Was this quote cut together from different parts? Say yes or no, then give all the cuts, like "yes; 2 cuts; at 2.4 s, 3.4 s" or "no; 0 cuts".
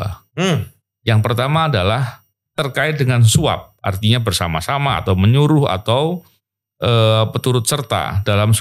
no; 0 cuts